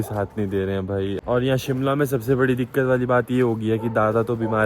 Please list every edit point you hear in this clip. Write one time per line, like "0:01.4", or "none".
0:01.1